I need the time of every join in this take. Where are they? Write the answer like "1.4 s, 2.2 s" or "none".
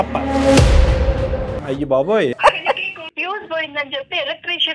1.5 s, 3.0 s